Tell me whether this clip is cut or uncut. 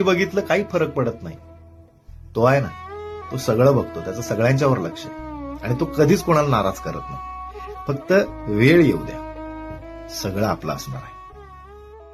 uncut